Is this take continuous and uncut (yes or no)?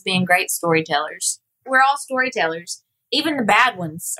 no